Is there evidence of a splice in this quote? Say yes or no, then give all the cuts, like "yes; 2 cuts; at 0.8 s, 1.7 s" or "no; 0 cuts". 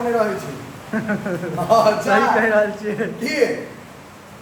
no; 0 cuts